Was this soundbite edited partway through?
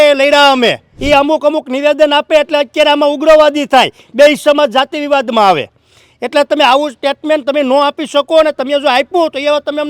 yes; 1 cut; at 0.9 s

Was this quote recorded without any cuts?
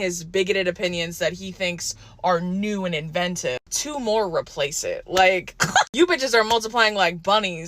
no; 1 cut; at 3.6 s

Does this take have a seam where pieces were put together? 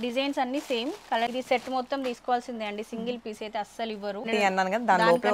yes; 2 cuts; at 1.3 s, 4.3 s

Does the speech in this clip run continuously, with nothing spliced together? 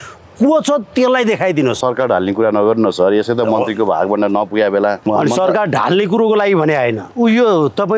no; 2 cuts; at 1.8 s, 5.0 s

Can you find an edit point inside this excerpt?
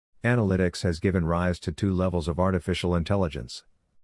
yes; 1 cut; at 2.6 s

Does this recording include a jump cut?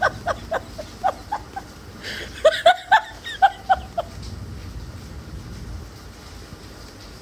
no; 0 cuts

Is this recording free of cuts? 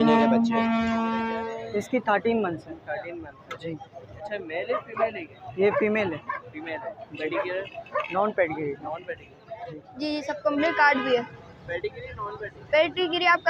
no; 2 cuts; at 1.3 s, 9.8 s

